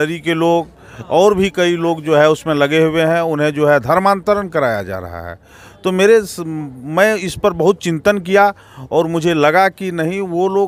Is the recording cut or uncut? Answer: uncut